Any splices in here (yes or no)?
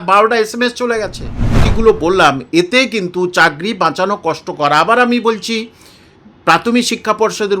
yes